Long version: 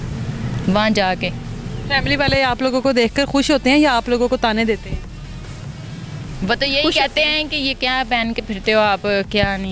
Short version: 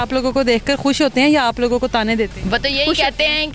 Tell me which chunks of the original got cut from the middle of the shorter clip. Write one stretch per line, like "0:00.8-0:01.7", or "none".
0:04.8-0:06.3